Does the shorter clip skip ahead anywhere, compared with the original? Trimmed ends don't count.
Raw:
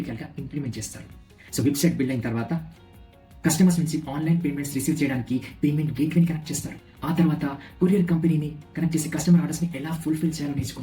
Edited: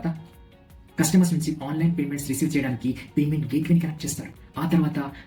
no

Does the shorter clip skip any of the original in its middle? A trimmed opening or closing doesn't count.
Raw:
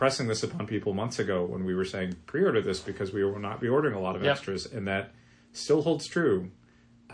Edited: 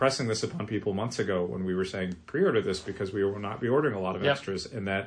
no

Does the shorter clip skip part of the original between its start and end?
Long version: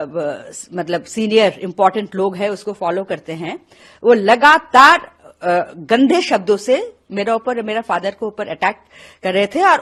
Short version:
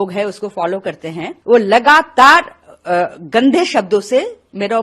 yes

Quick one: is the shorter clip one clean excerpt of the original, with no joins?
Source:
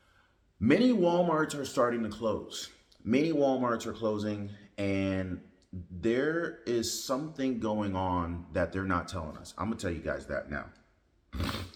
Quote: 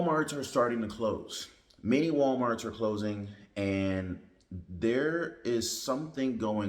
yes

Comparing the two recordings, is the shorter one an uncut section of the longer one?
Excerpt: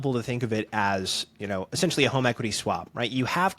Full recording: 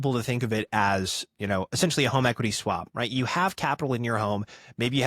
yes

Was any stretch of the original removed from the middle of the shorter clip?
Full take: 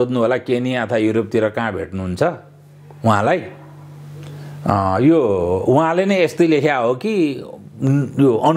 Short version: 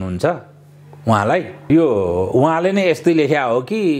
yes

